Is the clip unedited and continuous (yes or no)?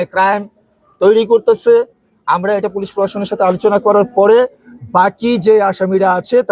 yes